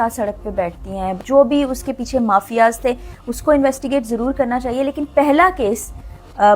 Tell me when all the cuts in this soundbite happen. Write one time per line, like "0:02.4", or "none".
0:01.2